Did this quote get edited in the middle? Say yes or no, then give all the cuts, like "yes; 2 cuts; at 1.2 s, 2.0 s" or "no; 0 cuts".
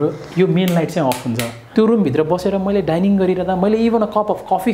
yes; 1 cut; at 1.6 s